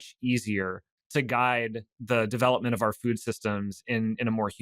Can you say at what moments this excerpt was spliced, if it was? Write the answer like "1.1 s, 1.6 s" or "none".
0.9 s, 1.9 s

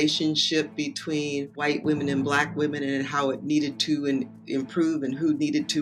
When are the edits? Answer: 1.6 s

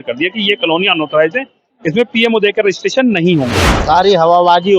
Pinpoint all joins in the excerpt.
3.7 s

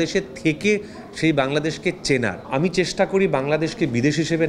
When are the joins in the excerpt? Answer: 2.5 s

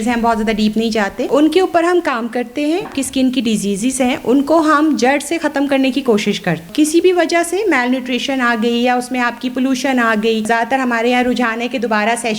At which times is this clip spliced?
1.2 s, 2.9 s, 6.7 s, 10.5 s

